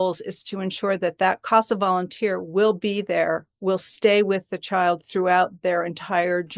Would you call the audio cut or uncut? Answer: uncut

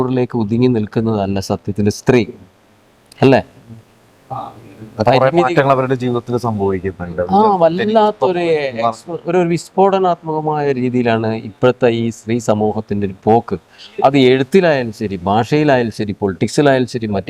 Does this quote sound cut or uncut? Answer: uncut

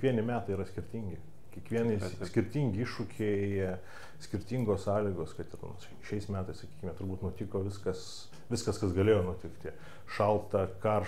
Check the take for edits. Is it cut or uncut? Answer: uncut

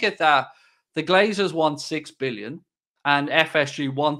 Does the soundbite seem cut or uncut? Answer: uncut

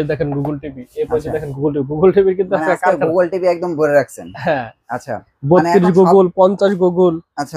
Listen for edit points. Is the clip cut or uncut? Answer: uncut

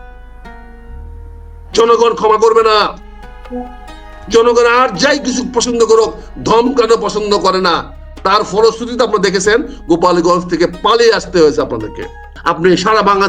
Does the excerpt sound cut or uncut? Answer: cut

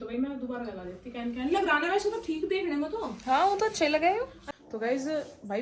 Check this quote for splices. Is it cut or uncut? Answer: cut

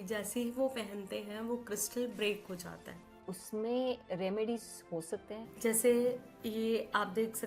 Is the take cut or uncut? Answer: cut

